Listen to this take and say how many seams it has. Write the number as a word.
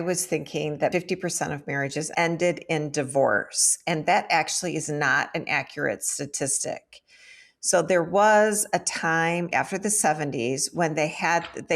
three